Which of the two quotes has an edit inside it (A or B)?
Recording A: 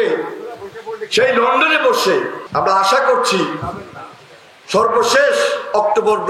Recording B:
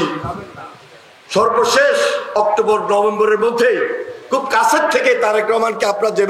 A